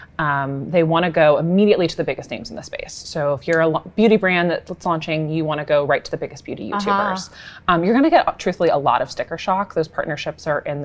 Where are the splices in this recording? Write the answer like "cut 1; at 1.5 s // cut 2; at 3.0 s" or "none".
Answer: none